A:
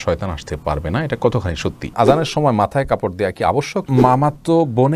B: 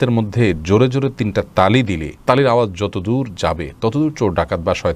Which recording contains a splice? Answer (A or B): A